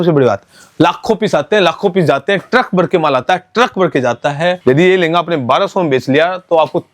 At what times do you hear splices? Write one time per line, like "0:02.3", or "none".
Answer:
0:04.6